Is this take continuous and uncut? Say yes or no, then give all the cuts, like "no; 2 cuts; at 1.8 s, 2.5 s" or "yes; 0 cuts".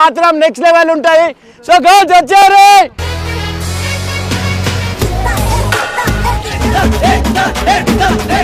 yes; 0 cuts